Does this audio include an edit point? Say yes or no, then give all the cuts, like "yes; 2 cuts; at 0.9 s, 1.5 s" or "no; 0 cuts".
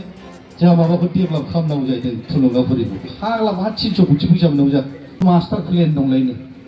yes; 1 cut; at 5.2 s